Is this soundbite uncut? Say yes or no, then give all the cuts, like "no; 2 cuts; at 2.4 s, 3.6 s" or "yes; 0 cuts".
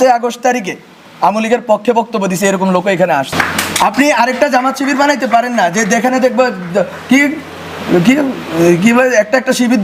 no; 1 cut; at 3.3 s